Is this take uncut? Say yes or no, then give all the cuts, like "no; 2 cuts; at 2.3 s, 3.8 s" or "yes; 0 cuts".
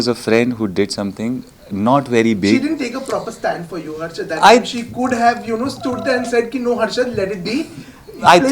yes; 0 cuts